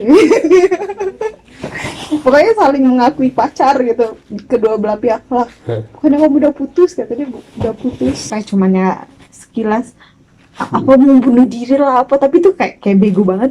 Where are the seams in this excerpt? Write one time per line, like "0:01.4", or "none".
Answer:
0:08.3